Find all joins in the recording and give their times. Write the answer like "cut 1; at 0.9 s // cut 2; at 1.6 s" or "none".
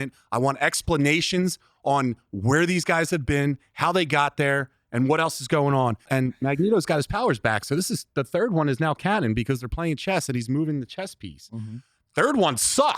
cut 1; at 6.1 s